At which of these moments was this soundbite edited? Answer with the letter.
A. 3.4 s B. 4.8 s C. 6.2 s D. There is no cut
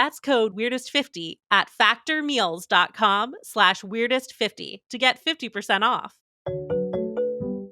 D